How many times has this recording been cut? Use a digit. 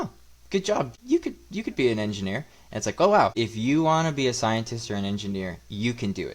2